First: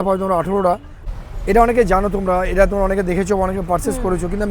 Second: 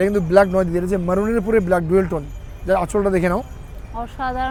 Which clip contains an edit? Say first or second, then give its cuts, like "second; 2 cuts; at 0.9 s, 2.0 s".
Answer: first; 1 cut; at 0.9 s